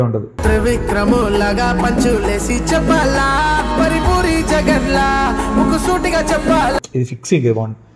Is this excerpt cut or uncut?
uncut